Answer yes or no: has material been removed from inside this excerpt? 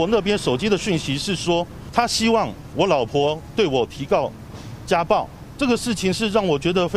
yes